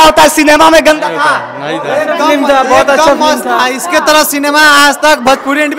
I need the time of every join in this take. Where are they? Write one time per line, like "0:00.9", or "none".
none